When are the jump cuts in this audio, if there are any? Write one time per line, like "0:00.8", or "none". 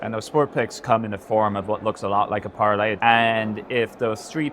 0:03.0